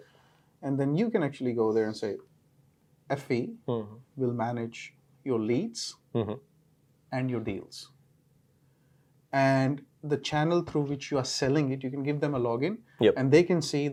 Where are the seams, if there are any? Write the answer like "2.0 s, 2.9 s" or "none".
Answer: none